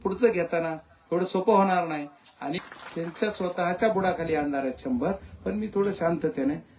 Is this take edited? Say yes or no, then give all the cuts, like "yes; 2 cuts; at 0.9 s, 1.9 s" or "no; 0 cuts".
yes; 1 cut; at 2.6 s